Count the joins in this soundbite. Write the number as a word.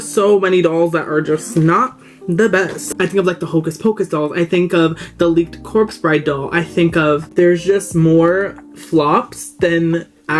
two